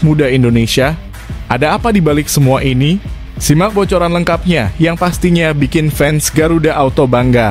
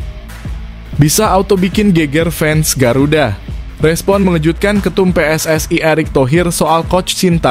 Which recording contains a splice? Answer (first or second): second